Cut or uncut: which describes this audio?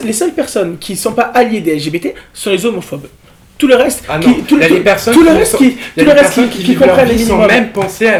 uncut